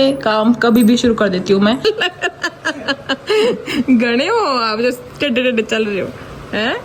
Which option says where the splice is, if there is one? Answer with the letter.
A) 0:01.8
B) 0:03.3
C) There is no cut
A